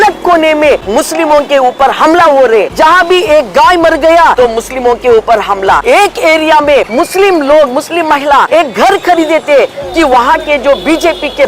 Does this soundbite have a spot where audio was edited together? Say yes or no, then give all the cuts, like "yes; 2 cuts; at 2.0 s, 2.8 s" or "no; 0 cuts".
yes; 6 cuts; at 0.8 s, 2.7 s, 4.3 s, 5.8 s, 6.9 s, 8.5 s